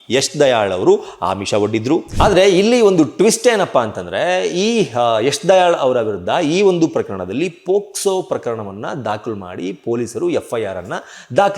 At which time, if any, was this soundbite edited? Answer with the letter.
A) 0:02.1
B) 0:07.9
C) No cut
A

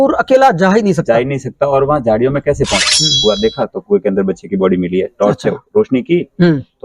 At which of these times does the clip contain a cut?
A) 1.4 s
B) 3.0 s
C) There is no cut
B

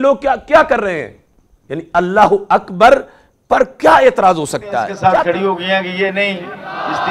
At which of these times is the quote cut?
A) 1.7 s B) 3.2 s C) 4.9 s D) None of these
C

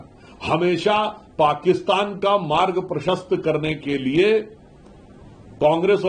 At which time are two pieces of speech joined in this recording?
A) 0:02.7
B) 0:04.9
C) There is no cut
C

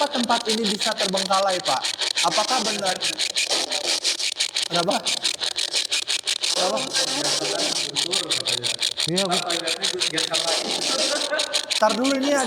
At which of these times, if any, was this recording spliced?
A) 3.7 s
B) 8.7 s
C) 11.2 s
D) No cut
D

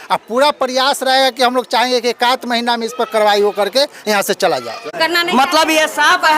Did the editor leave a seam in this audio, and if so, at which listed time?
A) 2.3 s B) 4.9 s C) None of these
B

